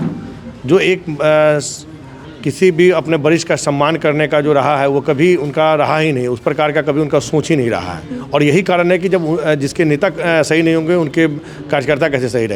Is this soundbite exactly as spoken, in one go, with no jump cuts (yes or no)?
yes